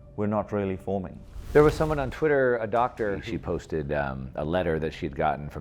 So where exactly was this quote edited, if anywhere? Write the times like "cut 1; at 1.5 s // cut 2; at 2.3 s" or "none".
cut 1; at 1.5 s // cut 2; at 3.2 s